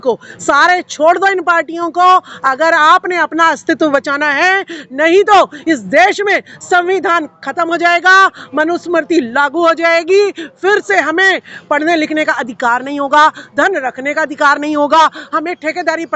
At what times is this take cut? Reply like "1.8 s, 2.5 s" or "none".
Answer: none